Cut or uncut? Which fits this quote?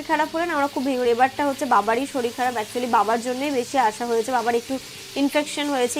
uncut